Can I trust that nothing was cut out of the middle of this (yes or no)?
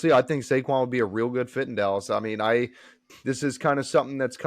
yes